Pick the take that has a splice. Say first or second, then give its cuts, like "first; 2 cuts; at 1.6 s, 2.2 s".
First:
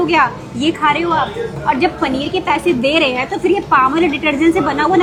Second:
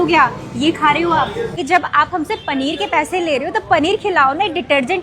second; 1 cut; at 1.6 s